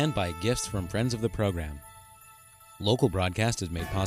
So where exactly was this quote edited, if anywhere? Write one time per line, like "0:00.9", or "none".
none